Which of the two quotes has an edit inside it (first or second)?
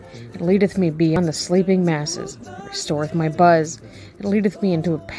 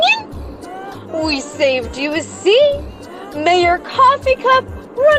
first